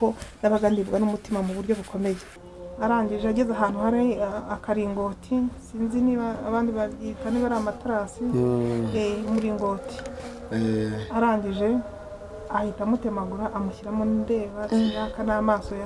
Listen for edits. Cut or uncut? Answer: cut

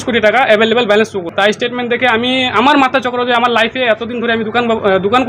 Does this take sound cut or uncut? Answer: cut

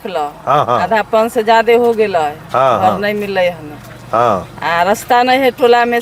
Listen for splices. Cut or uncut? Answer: uncut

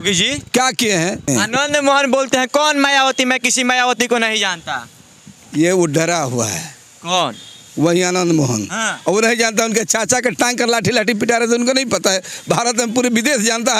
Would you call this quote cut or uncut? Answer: cut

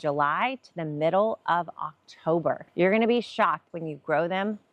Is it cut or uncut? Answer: cut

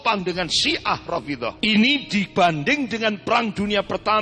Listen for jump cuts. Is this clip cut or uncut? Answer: cut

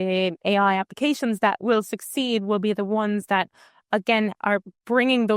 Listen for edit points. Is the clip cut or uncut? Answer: uncut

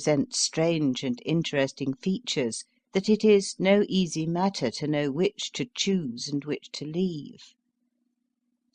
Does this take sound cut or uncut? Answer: uncut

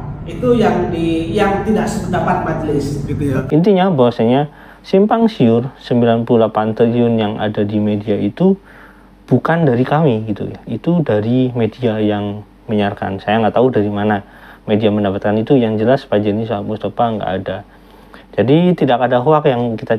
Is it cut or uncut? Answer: cut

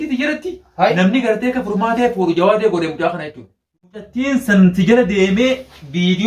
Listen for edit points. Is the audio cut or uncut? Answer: cut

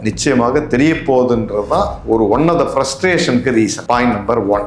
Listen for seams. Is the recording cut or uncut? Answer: cut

